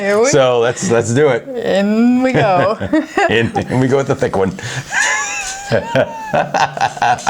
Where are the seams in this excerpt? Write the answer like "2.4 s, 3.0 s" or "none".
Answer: none

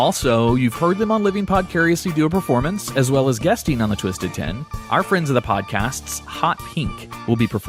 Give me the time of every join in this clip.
none

